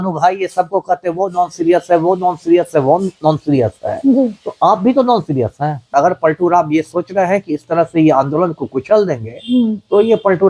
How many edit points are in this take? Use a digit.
1